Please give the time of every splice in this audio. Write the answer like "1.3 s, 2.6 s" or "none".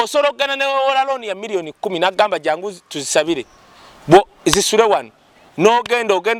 none